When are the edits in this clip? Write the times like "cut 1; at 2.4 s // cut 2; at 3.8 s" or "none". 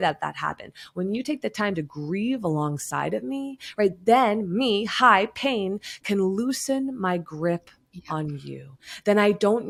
none